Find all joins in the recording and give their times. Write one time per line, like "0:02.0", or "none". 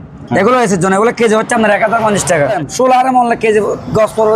0:02.6